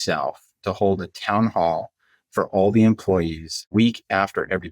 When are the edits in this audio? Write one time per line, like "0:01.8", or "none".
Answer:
0:03.7